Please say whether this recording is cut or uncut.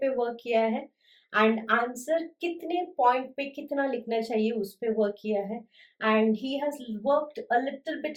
uncut